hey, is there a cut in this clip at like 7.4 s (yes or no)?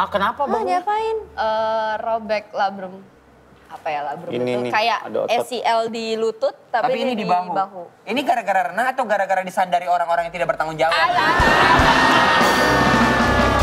no